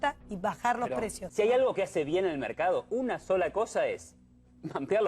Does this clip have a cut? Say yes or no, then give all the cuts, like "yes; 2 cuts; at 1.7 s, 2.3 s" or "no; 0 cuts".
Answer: yes; 1 cut; at 1.2 s